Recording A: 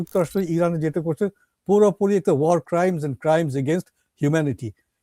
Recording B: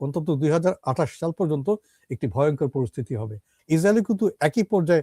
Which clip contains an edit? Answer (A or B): B